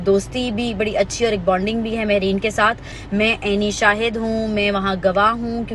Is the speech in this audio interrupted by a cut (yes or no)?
yes